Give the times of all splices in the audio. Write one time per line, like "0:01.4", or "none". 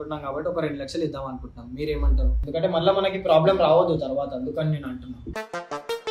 0:02.4